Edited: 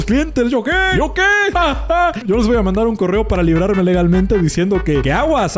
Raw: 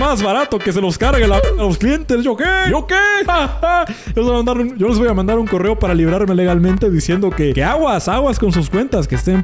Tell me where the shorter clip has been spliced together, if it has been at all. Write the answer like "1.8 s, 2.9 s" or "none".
2.2 s

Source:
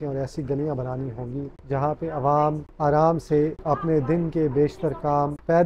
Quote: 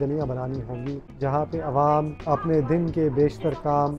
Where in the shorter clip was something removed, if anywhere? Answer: 2.2 s

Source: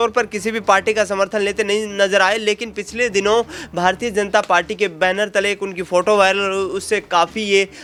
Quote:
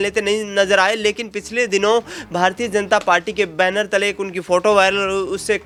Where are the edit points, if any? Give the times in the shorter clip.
none

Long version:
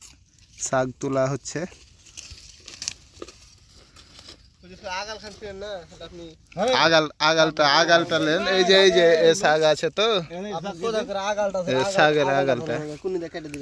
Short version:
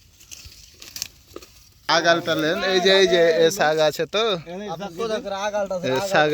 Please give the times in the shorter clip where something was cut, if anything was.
1.9 s

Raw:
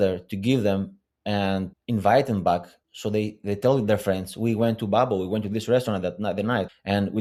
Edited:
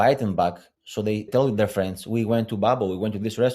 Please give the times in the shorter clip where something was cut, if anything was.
1.3 s

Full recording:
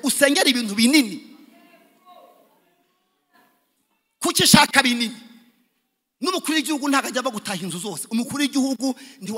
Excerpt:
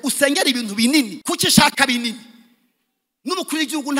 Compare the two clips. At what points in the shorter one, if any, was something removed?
1.2 s

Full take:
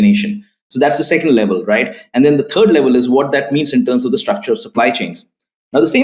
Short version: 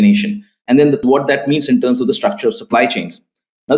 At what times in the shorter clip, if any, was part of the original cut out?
1.0 s

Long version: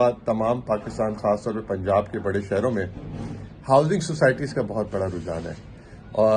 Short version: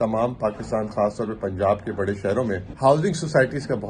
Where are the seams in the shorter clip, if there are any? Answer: 2.7 s

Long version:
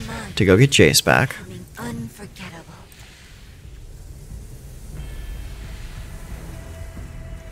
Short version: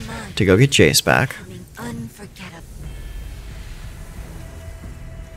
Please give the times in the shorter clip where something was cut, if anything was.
2.6 s

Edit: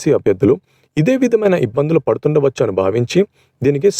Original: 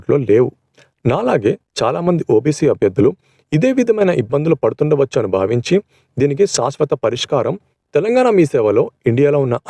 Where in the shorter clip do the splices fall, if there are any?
none

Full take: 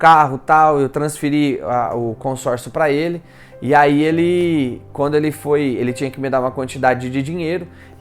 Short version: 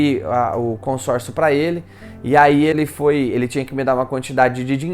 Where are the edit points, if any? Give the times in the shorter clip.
2.7 s

